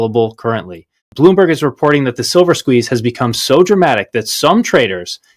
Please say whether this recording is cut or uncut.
cut